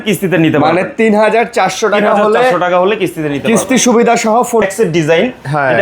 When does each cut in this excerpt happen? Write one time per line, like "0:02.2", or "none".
0:04.7

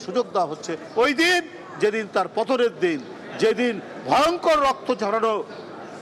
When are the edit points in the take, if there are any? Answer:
none

